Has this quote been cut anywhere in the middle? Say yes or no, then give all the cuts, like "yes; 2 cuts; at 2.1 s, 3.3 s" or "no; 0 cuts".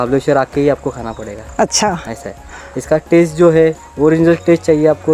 no; 0 cuts